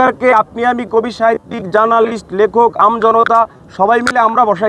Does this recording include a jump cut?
no; 0 cuts

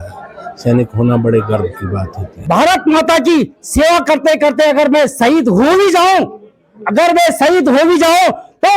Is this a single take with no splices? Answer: no; 1 cut; at 2.3 s

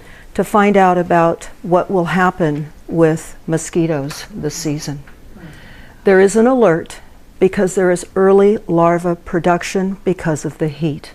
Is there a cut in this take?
no; 0 cuts

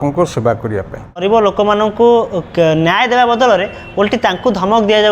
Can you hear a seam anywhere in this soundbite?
yes; 1 cut; at 1.2 s

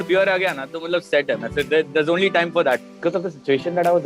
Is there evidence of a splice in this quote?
yes; 1 cut; at 2.9 s

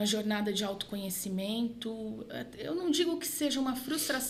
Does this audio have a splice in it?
no; 0 cuts

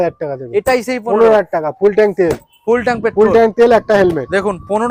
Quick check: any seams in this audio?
no; 0 cuts

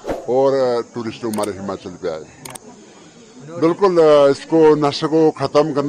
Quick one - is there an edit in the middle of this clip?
no; 0 cuts

